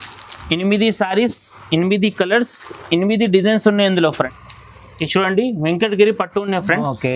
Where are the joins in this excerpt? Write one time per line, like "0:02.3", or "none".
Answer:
0:04.4

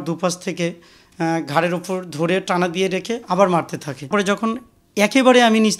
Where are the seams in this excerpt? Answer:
0:04.1

